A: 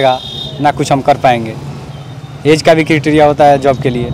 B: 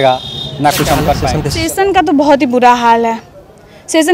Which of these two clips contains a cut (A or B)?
B